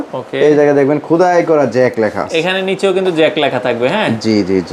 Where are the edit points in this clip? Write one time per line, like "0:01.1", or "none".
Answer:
none

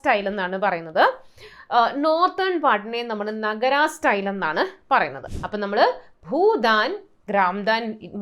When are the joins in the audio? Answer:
0:05.3

